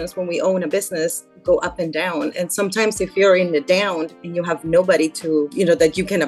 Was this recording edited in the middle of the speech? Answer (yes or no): no